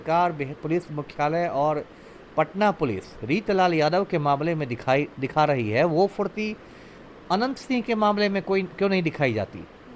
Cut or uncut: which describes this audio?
uncut